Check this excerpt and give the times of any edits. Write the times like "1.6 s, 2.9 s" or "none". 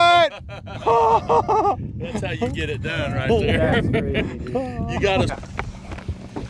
5.4 s